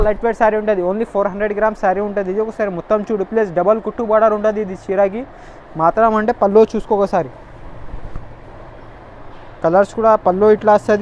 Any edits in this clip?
no; 0 cuts

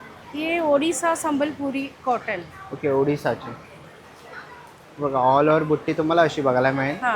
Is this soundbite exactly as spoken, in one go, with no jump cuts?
yes; 0 cuts

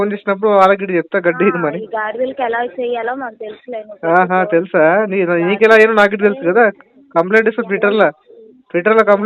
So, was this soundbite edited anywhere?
no; 0 cuts

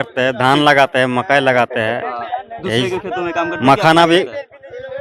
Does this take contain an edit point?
no; 0 cuts

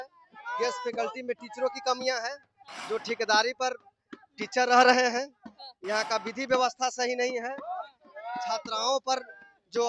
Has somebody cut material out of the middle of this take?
no; 0 cuts

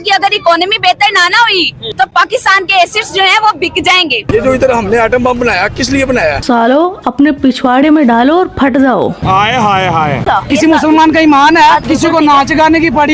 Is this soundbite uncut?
no; 4 cuts; at 1.8 s, 4.3 s, 6.4 s, 10.2 s

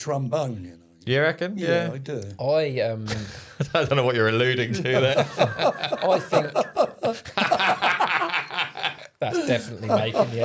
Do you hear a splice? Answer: no; 0 cuts

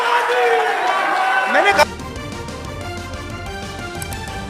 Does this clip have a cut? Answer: yes; 1 cut; at 1.9 s

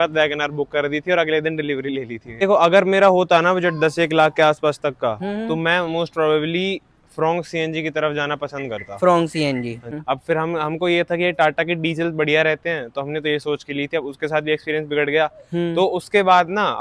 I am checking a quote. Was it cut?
yes; 2 cuts; at 2.4 s, 10.0 s

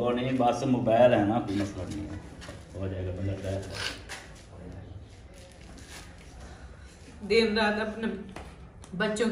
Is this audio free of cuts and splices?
yes; 0 cuts

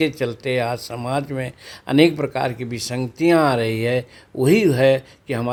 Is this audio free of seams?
yes; 0 cuts

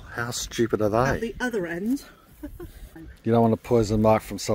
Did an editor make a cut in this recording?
yes; 1 cut; at 3.0 s

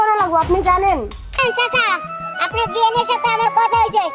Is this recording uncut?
no; 1 cut; at 1.4 s

